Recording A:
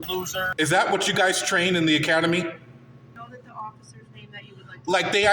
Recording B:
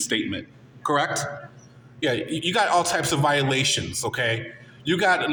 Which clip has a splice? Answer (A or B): A